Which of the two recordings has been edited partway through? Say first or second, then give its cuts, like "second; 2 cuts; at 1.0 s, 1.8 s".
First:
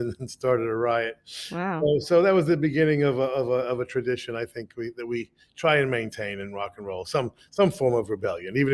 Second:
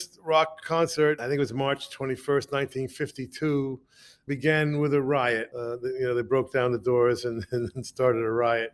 second; 3 cuts; at 1.2 s, 4.2 s, 5.5 s